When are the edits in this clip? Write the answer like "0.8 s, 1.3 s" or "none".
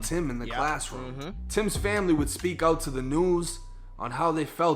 none